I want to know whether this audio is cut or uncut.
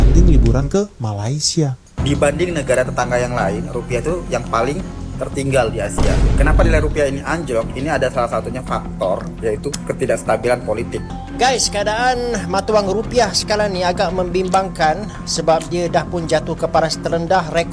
cut